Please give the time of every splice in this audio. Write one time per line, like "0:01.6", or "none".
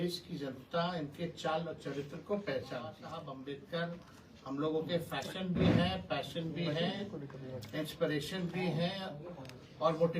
0:03.1

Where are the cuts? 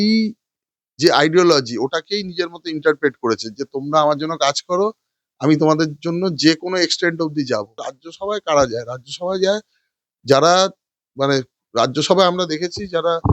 0:07.9

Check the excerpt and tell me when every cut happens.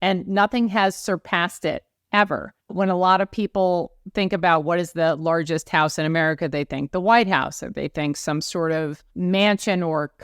0:01.9
0:02.6
0:09.0

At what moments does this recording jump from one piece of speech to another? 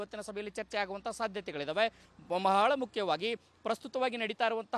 0:02.0

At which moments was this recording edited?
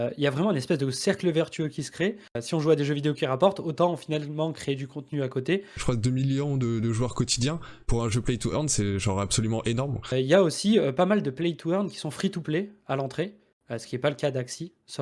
0:02.4
0:05.8
0:10.1

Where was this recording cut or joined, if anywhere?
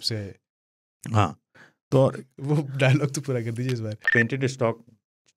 0:04.0

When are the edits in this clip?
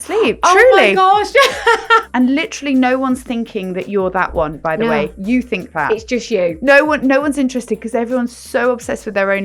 0:02.1

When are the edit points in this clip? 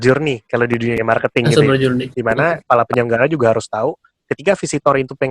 0:02.1

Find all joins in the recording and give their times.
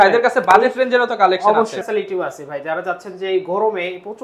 0:01.8

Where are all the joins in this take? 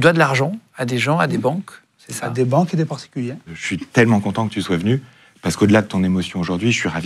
0:03.5

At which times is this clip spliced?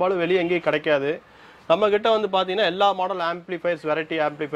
none

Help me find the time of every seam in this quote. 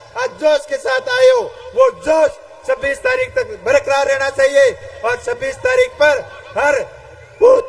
none

